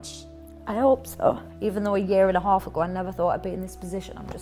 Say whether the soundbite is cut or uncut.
cut